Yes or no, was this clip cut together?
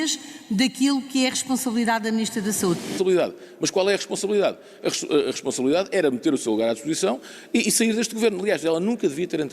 yes